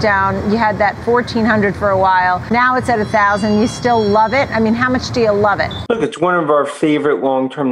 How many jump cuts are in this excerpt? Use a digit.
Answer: 2